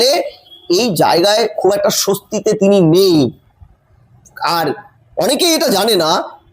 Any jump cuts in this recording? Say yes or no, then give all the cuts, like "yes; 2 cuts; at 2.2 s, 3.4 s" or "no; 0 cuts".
no; 0 cuts